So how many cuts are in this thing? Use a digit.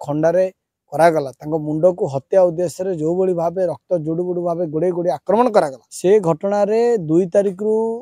1